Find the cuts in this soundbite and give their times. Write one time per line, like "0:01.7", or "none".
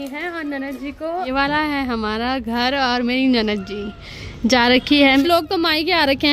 0:01.3
0:05.2